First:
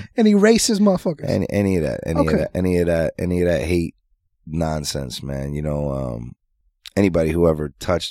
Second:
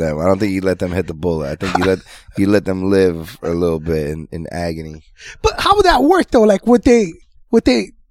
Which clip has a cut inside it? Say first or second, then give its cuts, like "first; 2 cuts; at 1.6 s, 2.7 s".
first; 1 cut; at 6.4 s